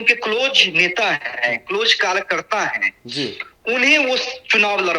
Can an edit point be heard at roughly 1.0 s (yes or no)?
no